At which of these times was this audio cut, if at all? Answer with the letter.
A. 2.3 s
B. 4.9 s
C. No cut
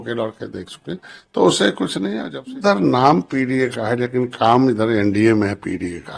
A